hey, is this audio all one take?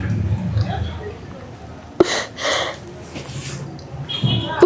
yes; 0 cuts

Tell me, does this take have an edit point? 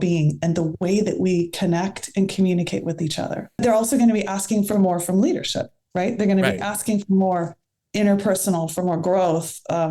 yes; 1 cut; at 3.6 s

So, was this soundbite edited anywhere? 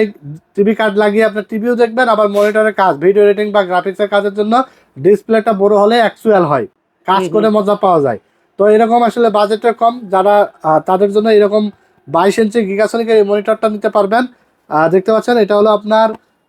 no; 0 cuts

